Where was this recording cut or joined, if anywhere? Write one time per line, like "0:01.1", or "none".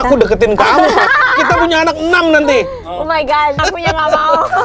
0:01.1
0:03.6